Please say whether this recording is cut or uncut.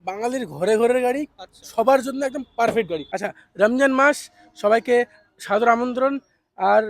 cut